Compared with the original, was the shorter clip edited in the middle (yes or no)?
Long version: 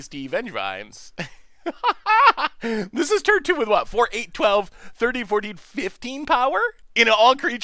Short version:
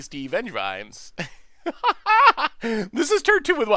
no